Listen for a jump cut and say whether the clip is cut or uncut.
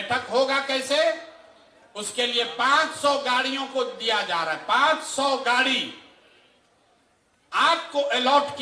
uncut